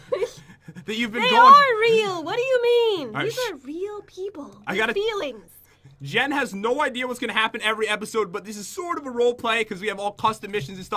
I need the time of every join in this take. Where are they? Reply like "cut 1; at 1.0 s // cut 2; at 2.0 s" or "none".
cut 1; at 2.8 s